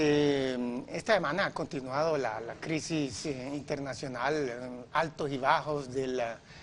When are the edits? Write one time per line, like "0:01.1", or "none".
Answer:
none